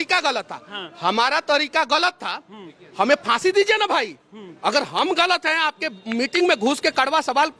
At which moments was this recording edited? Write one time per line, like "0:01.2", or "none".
none